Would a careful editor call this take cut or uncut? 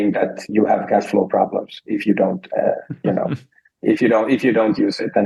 uncut